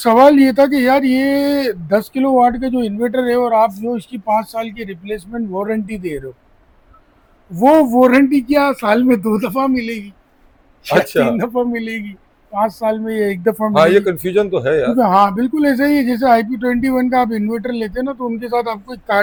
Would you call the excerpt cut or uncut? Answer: uncut